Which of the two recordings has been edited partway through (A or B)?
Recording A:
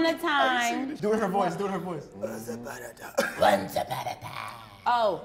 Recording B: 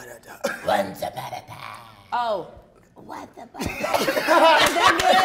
B